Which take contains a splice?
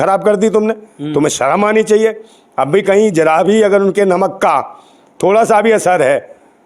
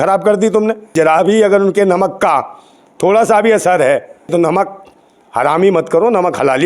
second; 2 cuts; at 0.9 s, 4.3 s

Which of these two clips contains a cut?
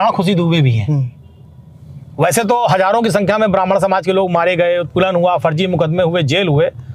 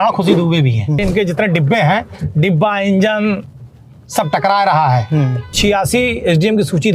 second; 2 cuts; at 1.0 s, 5.5 s

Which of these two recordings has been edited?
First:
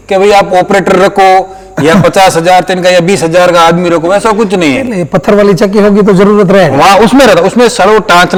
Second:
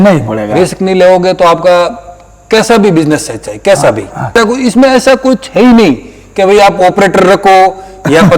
second; 1 cut; at 4.3 s

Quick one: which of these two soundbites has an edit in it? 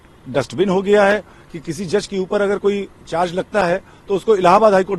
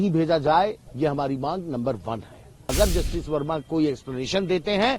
second; 1 cut; at 2.7 s

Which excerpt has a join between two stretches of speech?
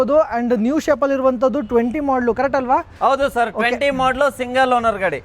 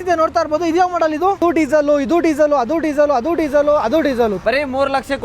second; 2 cuts; at 1.4 s, 4.4 s

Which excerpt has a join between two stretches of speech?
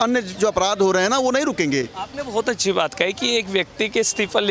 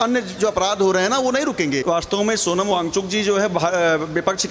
second; 1 cut; at 1.8 s

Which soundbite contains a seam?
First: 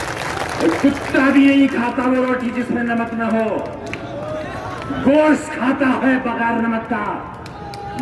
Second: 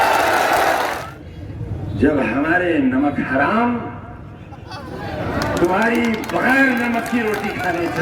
second; 1 cut; at 1.0 s

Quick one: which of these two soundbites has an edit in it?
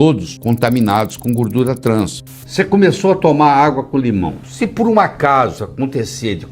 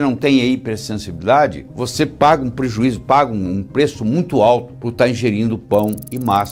first; 2 cuts; at 2.2 s, 4.4 s

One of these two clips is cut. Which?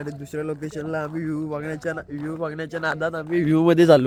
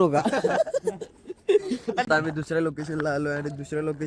second; 1 cut; at 2.0 s

